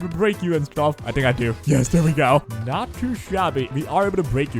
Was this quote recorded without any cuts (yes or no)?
no